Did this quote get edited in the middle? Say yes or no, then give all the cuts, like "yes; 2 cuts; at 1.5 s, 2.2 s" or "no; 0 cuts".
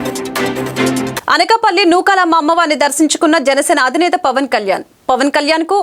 yes; 1 cut; at 1.1 s